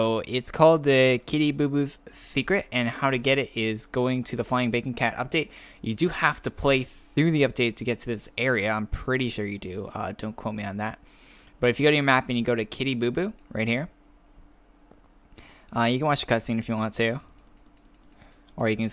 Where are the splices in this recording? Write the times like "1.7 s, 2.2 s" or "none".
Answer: none